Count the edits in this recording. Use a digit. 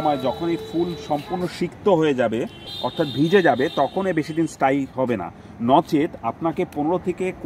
0